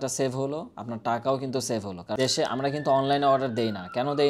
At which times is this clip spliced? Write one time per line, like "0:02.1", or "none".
0:02.0